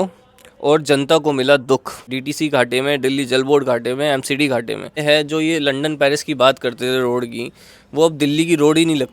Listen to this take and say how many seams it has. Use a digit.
2